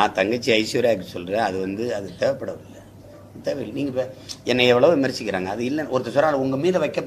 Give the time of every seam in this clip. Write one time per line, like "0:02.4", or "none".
none